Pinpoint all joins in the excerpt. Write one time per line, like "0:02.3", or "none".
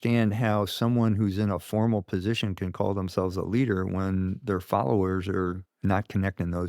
0:05.7